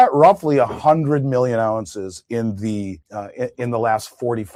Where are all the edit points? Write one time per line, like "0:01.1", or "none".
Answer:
none